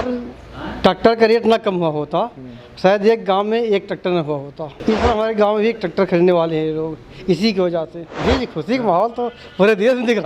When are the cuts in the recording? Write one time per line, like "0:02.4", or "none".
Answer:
0:04.8
0:08.0